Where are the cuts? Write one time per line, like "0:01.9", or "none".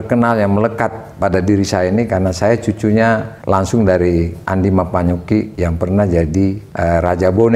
0:03.3
0:05.5
0:06.7